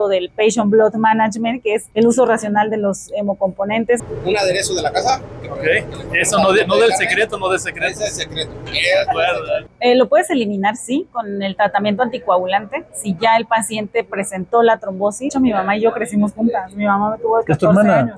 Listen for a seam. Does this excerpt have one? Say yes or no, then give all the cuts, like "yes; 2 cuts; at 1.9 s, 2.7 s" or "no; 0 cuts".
yes; 4 cuts; at 1.9 s, 4.0 s, 9.7 s, 15.3 s